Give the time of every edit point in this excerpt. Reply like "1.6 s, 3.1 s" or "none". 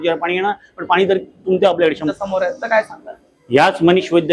2.0 s